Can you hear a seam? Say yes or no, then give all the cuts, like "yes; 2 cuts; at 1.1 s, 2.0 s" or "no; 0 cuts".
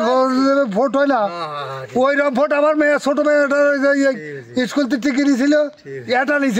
no; 0 cuts